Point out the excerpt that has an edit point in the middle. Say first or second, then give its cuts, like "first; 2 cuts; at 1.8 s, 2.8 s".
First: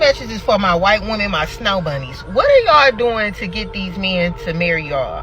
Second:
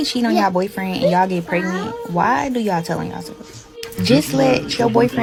first; 1 cut; at 2.2 s